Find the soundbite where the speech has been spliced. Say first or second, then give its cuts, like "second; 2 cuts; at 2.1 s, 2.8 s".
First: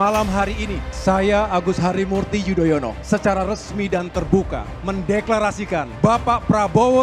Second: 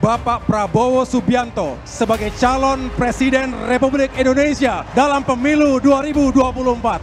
first; 2 cuts; at 0.9 s, 3.0 s